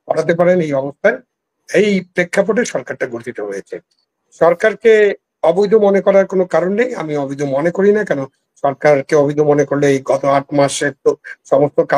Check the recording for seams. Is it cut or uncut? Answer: uncut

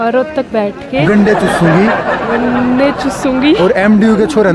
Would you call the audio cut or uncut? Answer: uncut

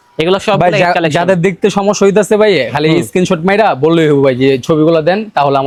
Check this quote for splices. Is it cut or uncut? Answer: uncut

